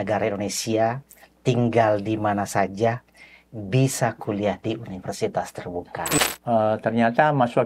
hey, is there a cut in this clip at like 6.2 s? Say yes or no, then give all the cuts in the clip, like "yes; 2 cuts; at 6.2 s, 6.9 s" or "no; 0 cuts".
yes; 1 cut; at 6.2 s